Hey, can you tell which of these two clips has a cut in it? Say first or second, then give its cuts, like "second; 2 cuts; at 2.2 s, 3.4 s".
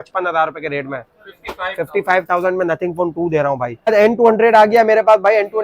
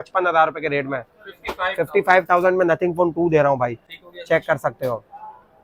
first; 1 cut; at 3.9 s